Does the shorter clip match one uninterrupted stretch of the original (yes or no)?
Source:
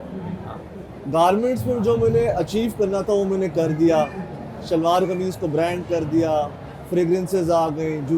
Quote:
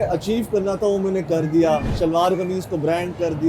no